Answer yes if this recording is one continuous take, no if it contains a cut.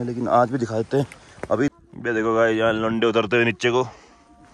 no